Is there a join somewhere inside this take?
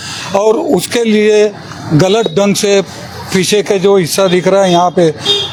no; 0 cuts

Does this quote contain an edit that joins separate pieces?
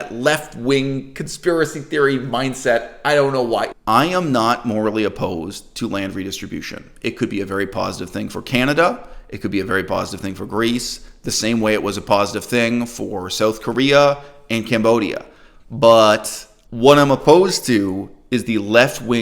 yes; 1 cut; at 3.7 s

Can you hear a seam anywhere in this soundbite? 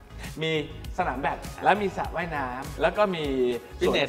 yes; 1 cut; at 1.5 s

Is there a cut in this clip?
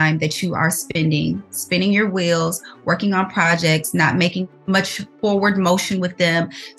yes; 1 cut; at 4.6 s

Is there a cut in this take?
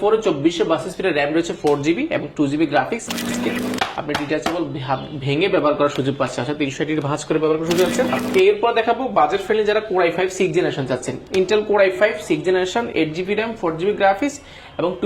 yes; 2 cuts; at 3.3 s, 8.2 s

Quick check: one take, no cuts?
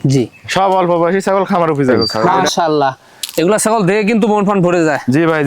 no; 1 cut; at 2.2 s

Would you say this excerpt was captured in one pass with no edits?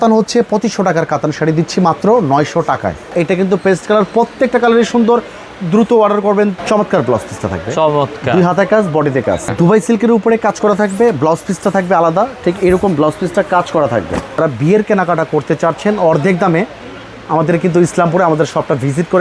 no; 4 cuts; at 3.0 s, 6.6 s, 9.5 s, 14.4 s

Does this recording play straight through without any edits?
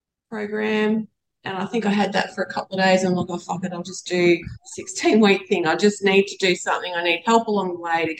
yes; 0 cuts

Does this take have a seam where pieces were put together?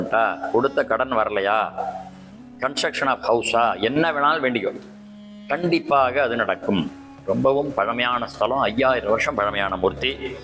yes; 1 cut; at 7.1 s

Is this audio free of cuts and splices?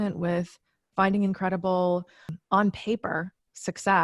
no; 1 cut; at 2.3 s

